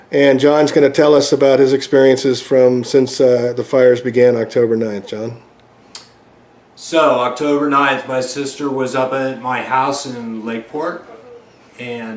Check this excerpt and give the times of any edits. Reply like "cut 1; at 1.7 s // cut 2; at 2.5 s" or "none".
cut 1; at 3.5 s